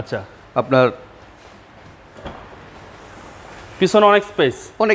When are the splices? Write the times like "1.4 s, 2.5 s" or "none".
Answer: none